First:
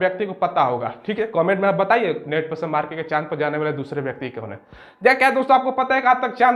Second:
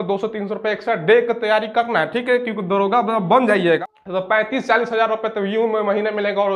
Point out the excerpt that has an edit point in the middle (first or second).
second